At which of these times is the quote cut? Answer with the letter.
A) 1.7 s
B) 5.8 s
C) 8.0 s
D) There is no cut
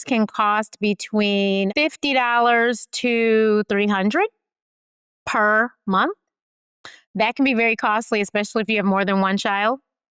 A